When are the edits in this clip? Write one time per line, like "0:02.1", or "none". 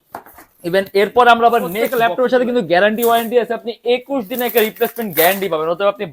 0:01.9